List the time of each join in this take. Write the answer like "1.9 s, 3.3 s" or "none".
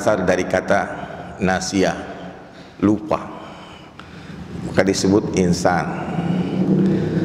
none